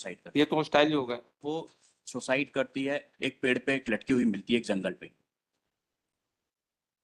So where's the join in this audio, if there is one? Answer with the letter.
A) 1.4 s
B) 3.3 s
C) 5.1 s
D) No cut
A